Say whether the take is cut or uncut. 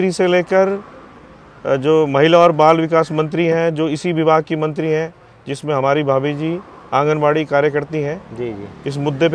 uncut